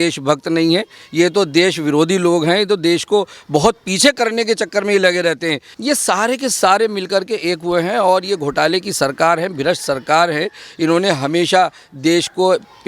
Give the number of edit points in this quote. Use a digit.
1